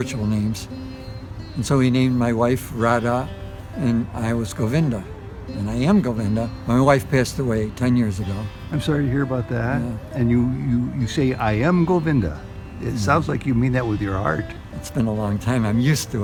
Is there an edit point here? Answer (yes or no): no